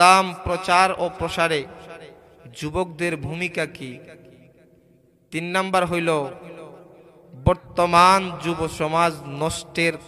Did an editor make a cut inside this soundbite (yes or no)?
no